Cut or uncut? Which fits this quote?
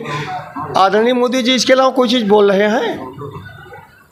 uncut